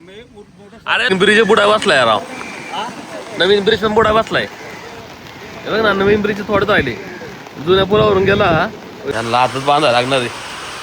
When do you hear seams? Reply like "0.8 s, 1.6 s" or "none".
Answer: 1.1 s, 8.9 s